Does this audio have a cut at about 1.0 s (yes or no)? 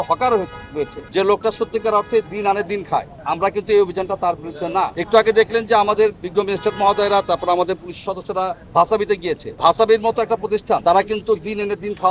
yes